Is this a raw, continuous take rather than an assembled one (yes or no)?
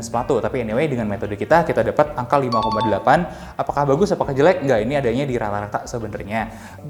yes